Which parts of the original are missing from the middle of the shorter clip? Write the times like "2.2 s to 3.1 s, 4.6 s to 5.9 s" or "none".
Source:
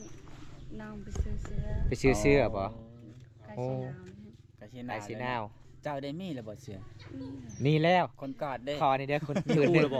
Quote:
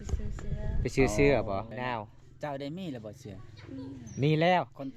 2.8 s to 5.1 s